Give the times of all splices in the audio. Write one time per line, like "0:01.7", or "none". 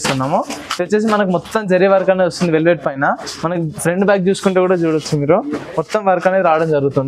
none